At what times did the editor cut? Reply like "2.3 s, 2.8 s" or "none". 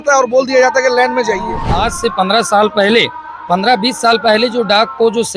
1.6 s